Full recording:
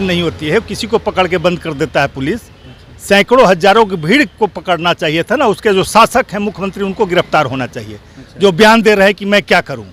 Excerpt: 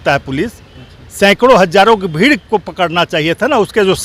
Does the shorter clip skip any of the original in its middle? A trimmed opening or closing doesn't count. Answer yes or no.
no